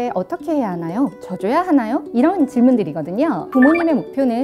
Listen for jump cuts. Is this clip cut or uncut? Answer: cut